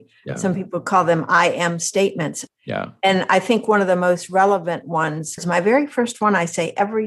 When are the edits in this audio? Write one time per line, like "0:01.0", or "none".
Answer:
0:02.4
0:05.4